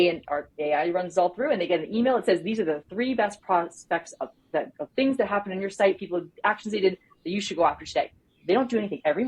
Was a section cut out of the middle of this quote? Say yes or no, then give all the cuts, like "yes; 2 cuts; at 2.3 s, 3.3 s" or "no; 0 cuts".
no; 0 cuts